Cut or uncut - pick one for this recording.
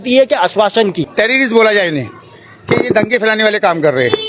cut